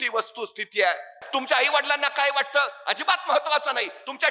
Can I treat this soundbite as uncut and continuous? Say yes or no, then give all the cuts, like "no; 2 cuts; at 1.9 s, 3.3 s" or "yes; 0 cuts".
no; 1 cut; at 1.2 s